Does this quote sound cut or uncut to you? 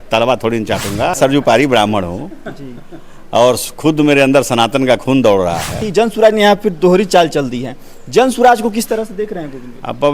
cut